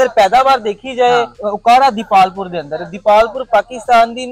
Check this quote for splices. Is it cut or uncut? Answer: cut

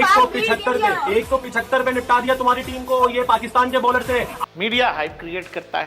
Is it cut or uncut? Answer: uncut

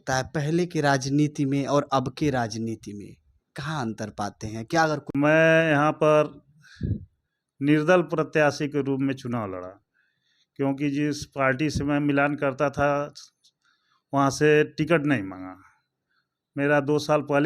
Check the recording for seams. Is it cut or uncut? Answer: cut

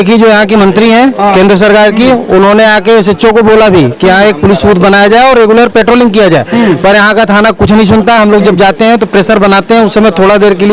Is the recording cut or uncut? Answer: uncut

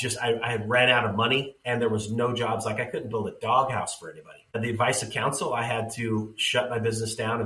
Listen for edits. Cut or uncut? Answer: cut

